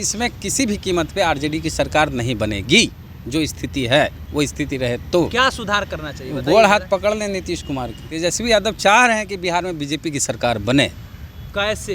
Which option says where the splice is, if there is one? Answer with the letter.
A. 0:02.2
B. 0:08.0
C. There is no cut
B